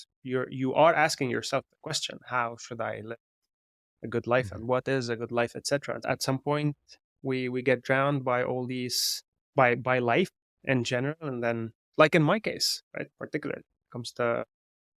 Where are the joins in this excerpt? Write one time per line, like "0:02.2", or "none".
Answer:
0:06.0